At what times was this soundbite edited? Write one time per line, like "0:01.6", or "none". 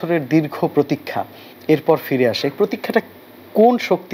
none